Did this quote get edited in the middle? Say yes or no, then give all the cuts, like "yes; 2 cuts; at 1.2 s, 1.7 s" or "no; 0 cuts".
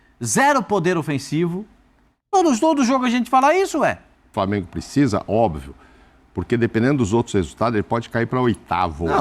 yes; 1 cut; at 4.3 s